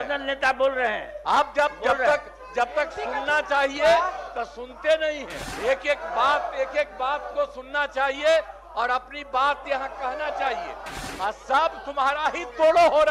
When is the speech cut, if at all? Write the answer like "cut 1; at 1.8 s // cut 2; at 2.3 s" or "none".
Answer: cut 1; at 5.4 s // cut 2; at 11.0 s